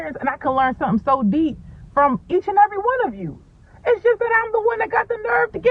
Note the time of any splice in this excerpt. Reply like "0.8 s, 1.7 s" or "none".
none